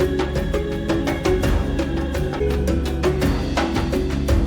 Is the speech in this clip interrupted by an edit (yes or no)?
yes